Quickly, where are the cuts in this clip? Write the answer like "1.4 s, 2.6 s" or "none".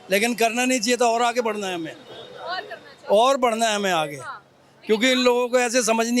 none